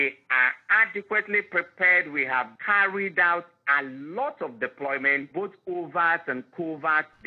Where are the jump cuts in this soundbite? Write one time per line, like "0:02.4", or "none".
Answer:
0:02.6
0:05.3